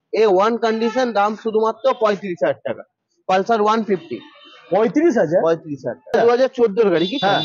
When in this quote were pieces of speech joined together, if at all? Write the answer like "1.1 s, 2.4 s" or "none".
6.1 s